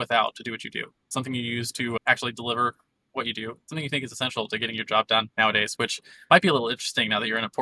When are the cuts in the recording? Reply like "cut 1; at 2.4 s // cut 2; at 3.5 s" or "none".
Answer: cut 1; at 1.1 s